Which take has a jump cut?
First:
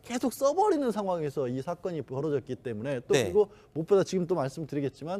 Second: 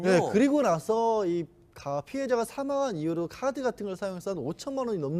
first; 1 cut; at 1.3 s

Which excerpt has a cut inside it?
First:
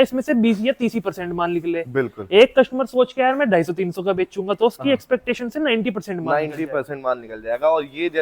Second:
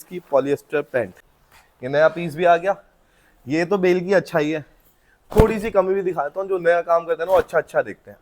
second; 1 cut; at 1.2 s

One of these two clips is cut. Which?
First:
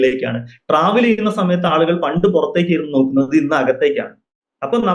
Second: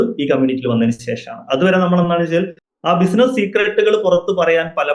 second; 1 cut; at 2.6 s

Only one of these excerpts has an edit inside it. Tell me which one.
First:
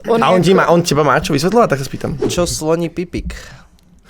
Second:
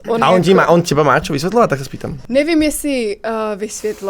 first; 1 cut; at 2.2 s

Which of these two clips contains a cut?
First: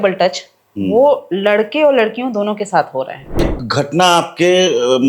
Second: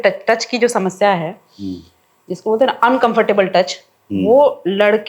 first; 1 cut; at 3.6 s

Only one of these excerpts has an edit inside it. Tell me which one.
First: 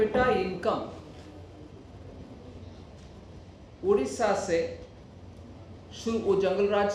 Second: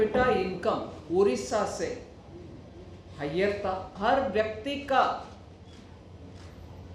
second; 2 cuts; at 0.9 s, 3.9 s

